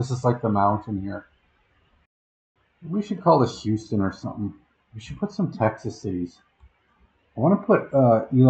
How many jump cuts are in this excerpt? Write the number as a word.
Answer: one